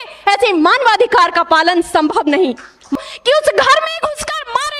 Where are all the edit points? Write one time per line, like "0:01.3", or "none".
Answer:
0:02.9